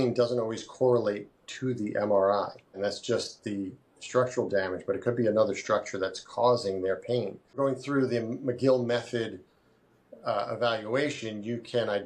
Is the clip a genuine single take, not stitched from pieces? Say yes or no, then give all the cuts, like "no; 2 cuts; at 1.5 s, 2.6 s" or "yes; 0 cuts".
no; 2 cuts; at 2.8 s, 7.6 s